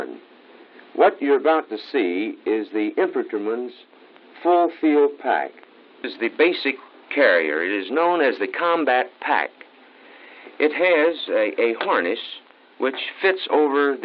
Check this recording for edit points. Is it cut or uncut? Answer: uncut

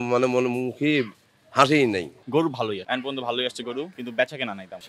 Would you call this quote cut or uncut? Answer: cut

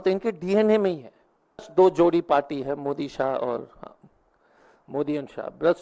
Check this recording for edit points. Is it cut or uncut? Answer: cut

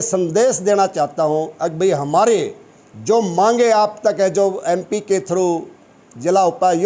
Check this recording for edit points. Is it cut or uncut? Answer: uncut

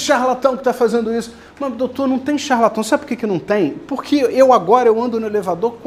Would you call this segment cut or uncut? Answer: uncut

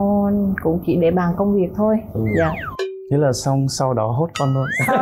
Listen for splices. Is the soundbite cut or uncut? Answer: uncut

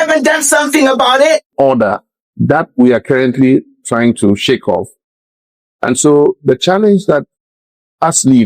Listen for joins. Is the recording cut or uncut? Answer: cut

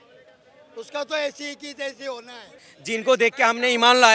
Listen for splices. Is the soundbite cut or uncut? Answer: cut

